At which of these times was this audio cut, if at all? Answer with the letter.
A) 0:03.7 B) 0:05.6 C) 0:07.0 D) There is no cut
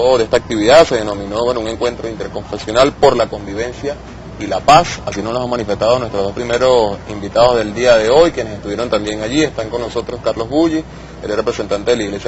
C